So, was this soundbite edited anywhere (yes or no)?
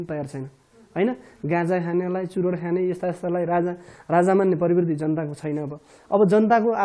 no